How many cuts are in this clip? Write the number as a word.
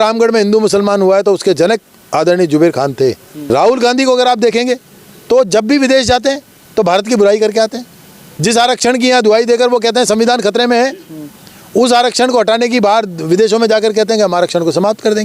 one